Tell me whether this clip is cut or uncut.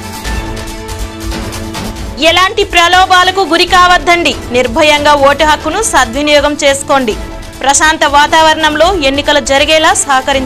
cut